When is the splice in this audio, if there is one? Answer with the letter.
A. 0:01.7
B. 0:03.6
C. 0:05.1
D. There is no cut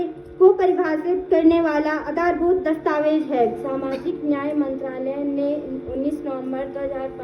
B